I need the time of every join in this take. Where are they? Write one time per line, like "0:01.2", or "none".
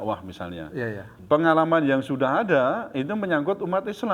0:01.1